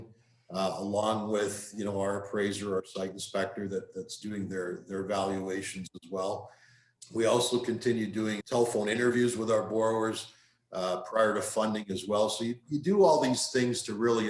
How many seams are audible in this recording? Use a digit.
1